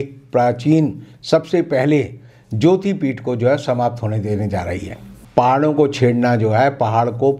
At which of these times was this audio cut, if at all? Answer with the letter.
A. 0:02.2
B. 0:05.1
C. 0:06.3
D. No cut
B